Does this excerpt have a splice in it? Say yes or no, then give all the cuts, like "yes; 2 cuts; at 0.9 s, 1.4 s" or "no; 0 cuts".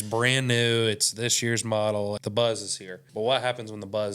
yes; 2 cuts; at 2.2 s, 3.0 s